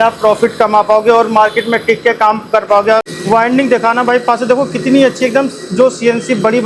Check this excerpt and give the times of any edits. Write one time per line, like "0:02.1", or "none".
0:03.0